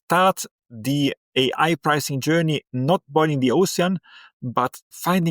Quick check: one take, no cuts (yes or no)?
no